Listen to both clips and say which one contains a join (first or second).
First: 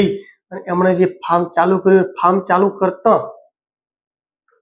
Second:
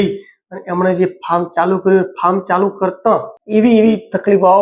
second